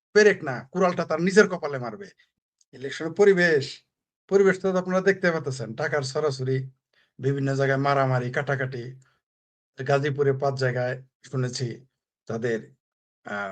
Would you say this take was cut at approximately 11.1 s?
no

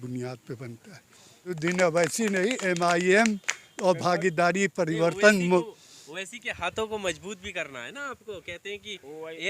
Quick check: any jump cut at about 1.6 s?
yes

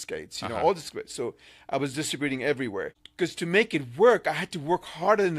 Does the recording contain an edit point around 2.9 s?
yes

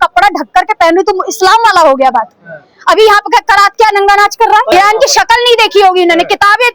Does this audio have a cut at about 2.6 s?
no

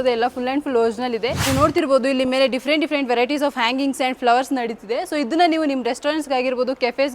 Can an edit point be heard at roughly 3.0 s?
no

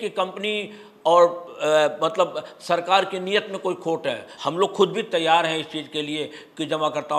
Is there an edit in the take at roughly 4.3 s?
yes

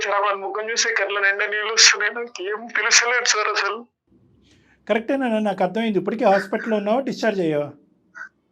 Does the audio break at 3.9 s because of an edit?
no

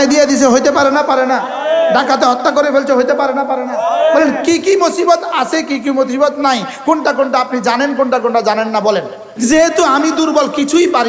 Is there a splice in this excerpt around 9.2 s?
yes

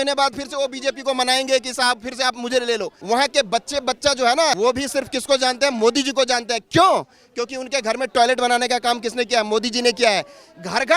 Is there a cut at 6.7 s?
no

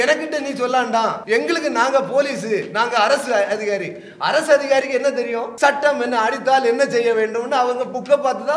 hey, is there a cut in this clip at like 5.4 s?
yes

